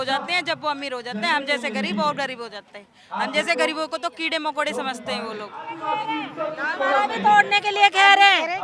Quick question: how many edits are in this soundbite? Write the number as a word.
one